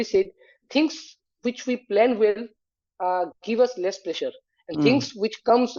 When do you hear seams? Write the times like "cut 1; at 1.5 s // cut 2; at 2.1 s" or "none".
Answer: none

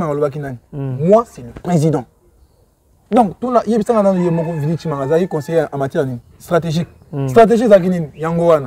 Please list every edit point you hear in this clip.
none

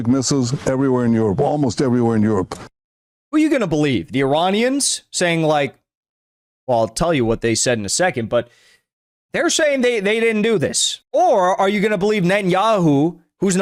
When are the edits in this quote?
none

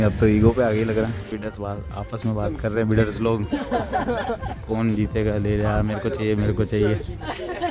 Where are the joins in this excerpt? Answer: none

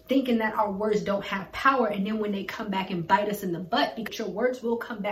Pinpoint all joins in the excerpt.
cut 1; at 4.0 s

